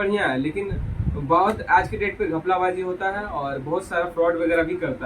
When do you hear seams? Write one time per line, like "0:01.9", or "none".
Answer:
none